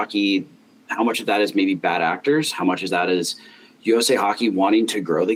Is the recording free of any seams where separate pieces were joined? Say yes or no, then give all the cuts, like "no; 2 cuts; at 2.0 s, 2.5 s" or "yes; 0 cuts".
yes; 0 cuts